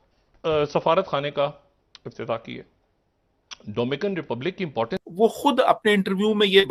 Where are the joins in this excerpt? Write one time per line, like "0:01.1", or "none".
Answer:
0:05.0